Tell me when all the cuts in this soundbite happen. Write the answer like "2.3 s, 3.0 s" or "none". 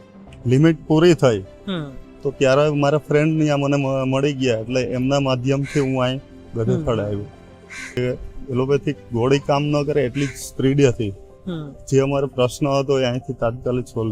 8.0 s